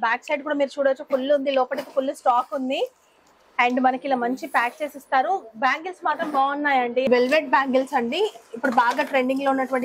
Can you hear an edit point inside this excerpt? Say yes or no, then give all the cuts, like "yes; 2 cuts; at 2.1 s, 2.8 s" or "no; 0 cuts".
yes; 1 cut; at 7.1 s